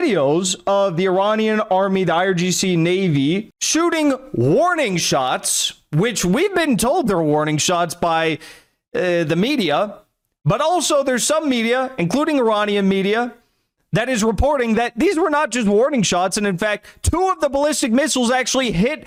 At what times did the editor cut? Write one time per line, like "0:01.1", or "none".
none